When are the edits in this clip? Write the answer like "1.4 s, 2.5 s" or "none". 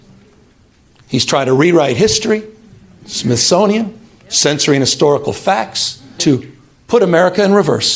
6.2 s